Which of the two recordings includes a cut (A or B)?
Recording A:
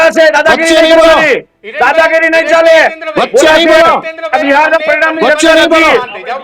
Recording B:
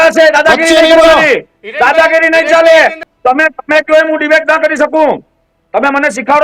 B